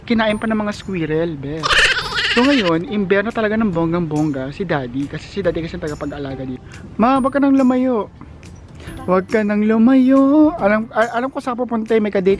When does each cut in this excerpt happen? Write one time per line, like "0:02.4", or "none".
0:06.7